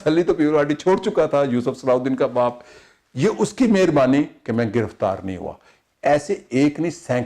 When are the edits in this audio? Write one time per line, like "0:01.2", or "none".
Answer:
none